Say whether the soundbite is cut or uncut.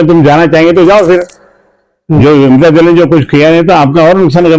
uncut